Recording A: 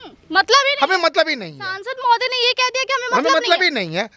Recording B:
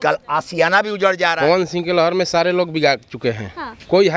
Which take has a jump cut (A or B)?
B